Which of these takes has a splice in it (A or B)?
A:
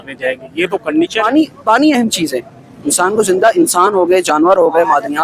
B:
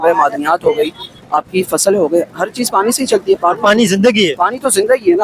A